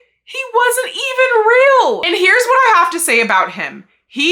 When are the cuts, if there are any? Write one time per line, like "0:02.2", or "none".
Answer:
0:02.0

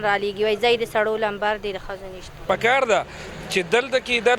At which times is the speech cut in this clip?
0:02.4

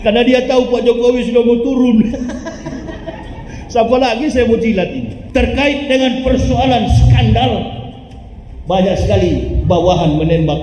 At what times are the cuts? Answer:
0:05.1

